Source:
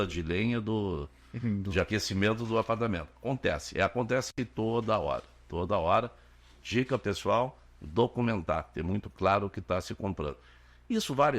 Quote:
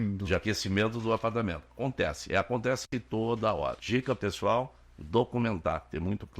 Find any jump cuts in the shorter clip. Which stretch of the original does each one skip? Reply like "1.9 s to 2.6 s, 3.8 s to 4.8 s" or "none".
5.3 s to 6.6 s

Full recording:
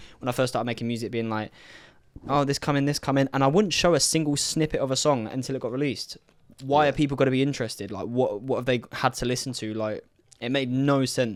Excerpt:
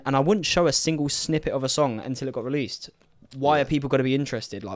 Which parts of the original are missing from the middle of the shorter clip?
none

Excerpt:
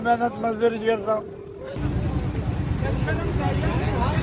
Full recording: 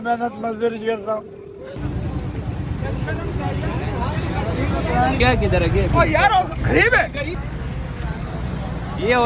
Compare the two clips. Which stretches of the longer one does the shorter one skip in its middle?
none

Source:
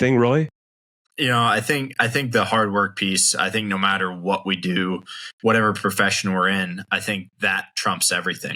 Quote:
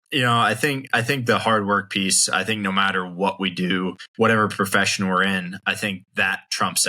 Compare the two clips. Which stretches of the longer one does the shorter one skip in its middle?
5.1 s to 5.3 s

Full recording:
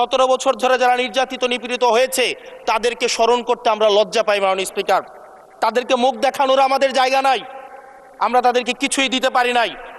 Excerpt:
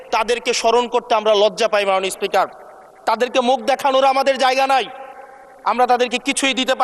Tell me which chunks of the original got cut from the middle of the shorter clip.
none

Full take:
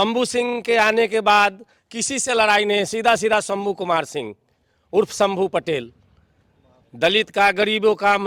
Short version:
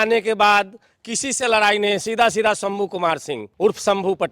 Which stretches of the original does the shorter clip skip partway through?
4.3 s to 4.7 s

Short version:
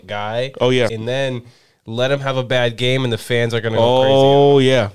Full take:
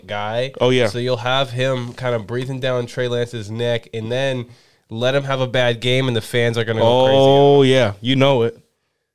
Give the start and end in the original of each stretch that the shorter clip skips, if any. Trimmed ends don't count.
0.9 s to 4.0 s

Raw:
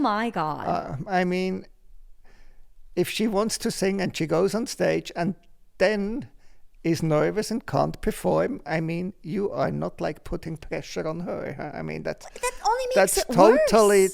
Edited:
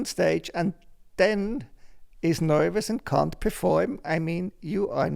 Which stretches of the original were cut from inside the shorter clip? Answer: none

